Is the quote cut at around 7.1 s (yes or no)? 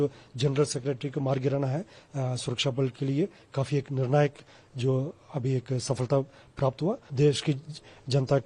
yes